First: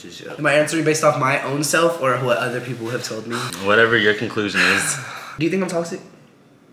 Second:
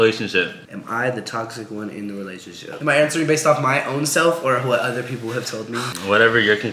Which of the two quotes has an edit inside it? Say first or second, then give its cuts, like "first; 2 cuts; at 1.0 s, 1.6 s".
first; 1 cut; at 5.4 s